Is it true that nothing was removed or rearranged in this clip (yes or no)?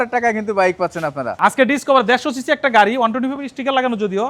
no